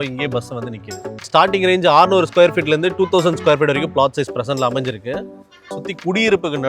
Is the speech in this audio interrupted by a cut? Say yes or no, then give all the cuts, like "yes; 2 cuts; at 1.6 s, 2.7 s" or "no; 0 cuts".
yes; 2 cuts; at 1.2 s, 5.8 s